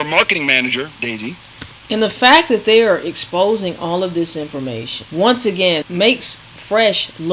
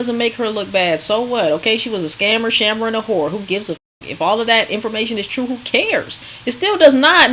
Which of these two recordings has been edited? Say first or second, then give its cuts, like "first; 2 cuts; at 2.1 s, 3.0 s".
first; 2 cuts; at 4.9 s, 5.8 s